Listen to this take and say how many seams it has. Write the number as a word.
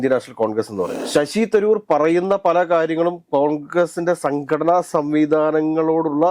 one